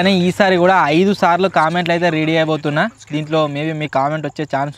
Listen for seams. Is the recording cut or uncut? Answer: uncut